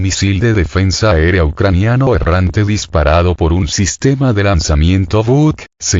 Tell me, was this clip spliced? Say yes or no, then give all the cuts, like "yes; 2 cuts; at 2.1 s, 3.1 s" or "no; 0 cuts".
yes; 1 cut; at 1.1 s